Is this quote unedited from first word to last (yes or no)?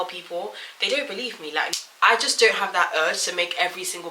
no